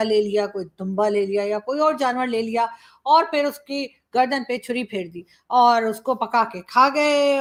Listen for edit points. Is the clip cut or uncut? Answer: uncut